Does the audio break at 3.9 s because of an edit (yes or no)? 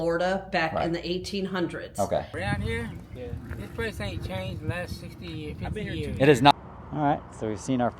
no